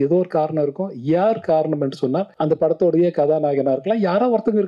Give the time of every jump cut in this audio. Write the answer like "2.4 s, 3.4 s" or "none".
2.3 s